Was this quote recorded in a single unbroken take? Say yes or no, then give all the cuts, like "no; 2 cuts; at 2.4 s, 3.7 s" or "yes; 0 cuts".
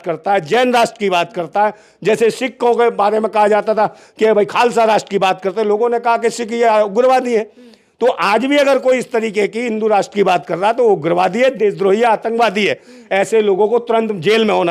yes; 0 cuts